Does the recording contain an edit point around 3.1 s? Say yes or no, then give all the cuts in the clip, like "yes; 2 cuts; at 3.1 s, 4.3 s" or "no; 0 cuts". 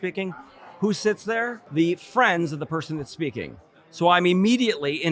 no; 1 cut; at 1.6 s